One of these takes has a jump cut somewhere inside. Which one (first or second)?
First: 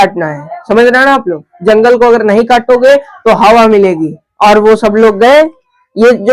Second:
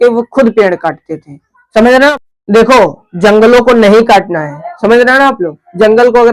second